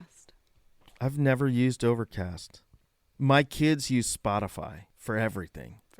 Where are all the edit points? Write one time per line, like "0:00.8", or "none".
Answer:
0:04.9